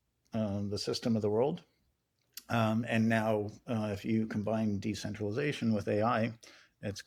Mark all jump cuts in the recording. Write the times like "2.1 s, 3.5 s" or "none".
none